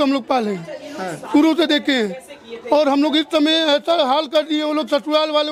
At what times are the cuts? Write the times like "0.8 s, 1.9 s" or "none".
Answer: none